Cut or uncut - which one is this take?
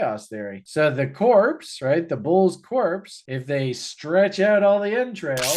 uncut